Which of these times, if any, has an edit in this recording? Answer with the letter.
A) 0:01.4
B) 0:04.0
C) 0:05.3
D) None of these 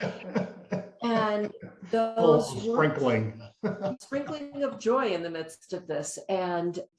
B